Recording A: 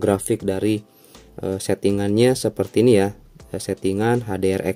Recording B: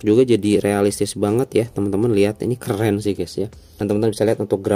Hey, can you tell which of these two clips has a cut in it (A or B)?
B